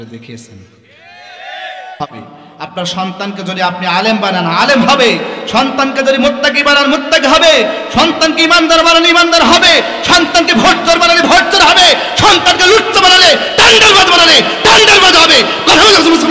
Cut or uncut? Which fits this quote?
cut